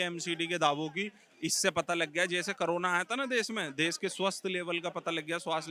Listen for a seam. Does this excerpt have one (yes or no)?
no